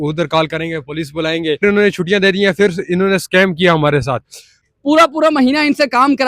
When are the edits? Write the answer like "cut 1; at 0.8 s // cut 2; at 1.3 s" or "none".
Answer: cut 1; at 1.6 s // cut 2; at 4.5 s